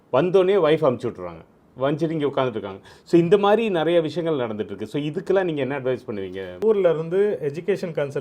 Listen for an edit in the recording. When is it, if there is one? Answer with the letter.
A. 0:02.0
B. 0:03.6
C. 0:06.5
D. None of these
C